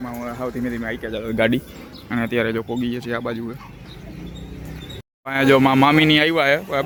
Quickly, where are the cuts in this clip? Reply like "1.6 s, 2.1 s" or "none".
none